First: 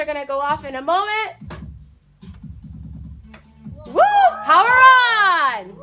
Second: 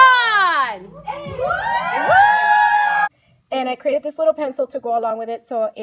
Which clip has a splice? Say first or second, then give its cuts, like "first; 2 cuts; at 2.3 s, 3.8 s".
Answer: second; 1 cut; at 3.0 s